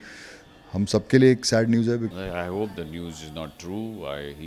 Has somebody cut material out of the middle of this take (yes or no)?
yes